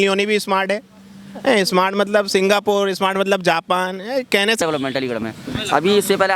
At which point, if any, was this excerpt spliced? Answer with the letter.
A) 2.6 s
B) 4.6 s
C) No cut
B